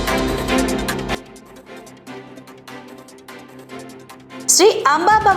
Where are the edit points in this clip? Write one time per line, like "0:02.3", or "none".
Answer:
0:00.9